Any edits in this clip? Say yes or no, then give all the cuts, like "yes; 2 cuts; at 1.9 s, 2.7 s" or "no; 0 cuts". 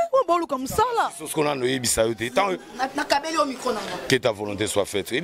no; 0 cuts